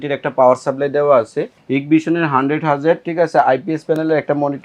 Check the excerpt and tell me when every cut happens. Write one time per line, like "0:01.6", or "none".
0:01.5